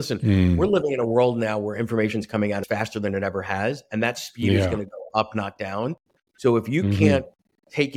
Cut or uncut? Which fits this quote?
cut